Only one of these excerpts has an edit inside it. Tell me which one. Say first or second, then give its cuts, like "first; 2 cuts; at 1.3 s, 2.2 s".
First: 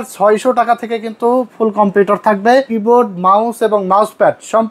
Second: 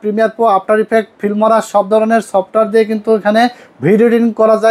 first; 1 cut; at 2.7 s